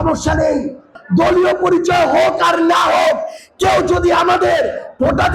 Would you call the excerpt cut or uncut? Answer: cut